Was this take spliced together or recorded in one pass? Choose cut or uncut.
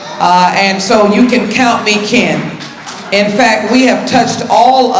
uncut